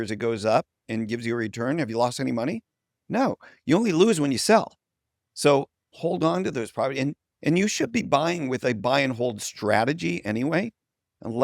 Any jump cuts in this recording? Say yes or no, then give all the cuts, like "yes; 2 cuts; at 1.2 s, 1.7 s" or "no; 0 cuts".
no; 0 cuts